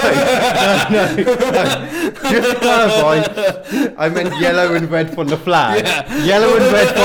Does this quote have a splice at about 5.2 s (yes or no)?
no